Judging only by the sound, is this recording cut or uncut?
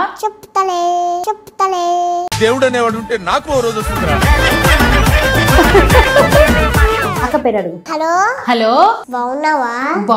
uncut